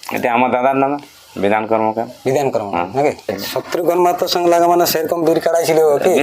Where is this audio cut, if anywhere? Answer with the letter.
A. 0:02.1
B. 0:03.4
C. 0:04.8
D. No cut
B